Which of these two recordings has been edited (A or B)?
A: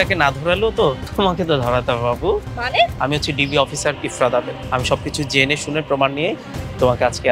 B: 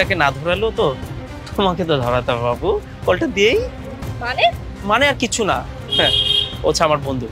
A